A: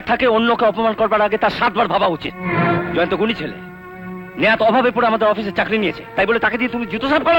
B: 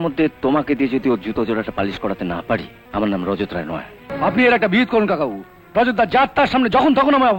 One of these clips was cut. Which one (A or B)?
B